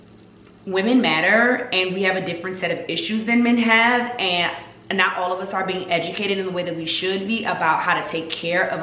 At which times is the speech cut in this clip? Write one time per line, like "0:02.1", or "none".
none